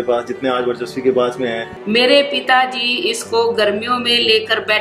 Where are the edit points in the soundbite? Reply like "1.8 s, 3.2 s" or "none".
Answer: 1.7 s